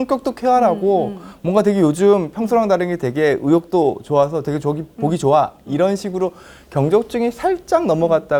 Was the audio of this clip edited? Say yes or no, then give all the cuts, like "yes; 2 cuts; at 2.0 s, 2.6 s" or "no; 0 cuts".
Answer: no; 0 cuts